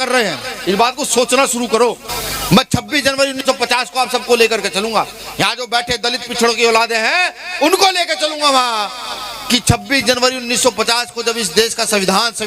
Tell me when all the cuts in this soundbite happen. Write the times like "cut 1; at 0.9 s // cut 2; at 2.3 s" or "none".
cut 1; at 2.2 s